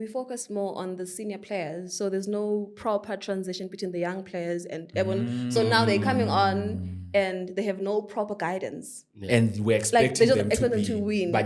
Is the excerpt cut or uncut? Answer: uncut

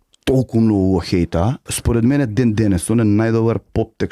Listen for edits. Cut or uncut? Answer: cut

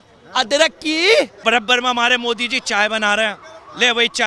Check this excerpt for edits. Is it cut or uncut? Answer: cut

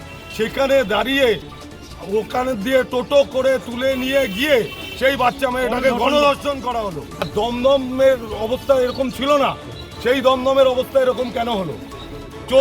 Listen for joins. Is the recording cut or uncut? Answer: cut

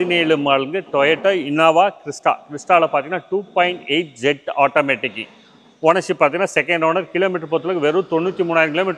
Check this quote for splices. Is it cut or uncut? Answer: uncut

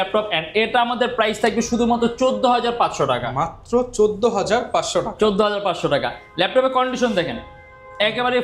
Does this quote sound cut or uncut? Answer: uncut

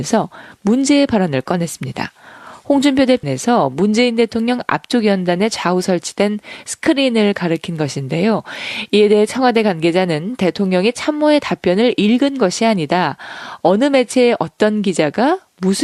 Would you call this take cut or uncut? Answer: uncut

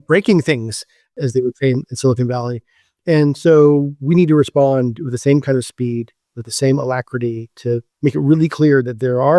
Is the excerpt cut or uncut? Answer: cut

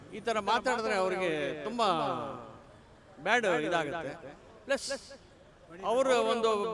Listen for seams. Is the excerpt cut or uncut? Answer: uncut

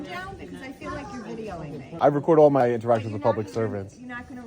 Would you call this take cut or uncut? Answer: cut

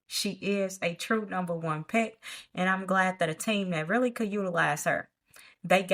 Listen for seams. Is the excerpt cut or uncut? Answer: uncut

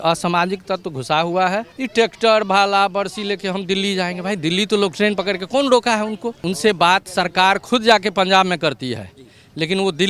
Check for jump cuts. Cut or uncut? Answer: cut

